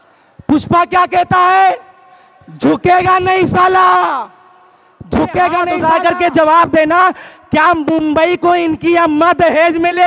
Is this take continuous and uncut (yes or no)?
no